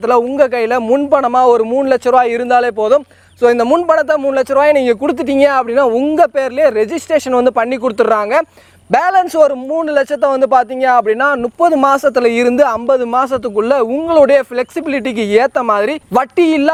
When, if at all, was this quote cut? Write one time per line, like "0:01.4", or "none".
none